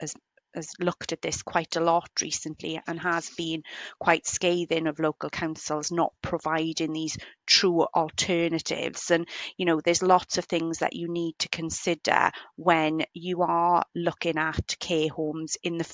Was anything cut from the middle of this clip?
no; 0 cuts

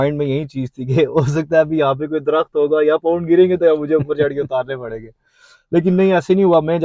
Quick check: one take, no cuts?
yes; 0 cuts

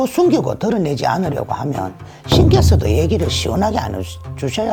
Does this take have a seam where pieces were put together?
no; 0 cuts

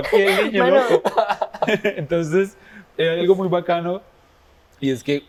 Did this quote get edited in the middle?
no; 0 cuts

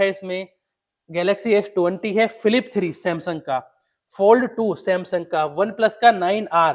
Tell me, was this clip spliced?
no; 0 cuts

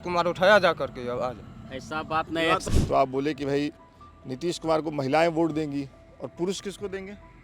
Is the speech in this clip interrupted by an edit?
yes; 1 cut; at 2.6 s

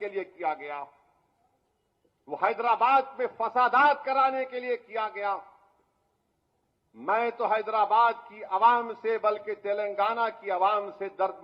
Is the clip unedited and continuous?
yes; 0 cuts

